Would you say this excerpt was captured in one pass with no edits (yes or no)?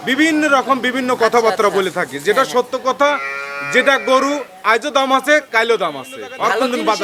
yes